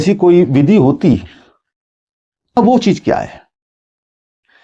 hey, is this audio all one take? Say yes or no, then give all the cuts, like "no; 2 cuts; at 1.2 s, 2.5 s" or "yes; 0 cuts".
no; 1 cut; at 2.6 s